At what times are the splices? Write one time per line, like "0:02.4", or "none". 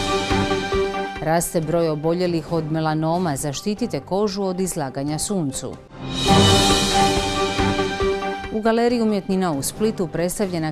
none